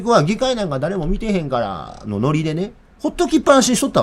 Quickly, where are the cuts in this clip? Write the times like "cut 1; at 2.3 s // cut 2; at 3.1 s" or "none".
cut 1; at 2.8 s